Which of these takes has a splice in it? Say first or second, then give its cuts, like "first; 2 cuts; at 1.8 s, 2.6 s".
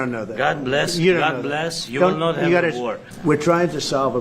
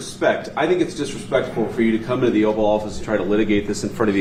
first; 1 cut; at 3.0 s